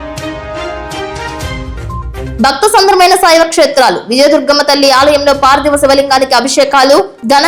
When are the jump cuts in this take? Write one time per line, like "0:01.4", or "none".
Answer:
none

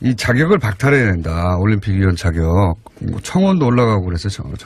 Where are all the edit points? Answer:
none

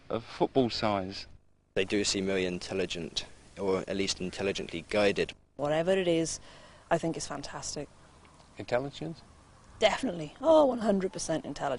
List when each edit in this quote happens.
none

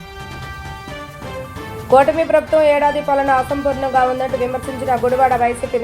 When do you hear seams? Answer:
0:01.5

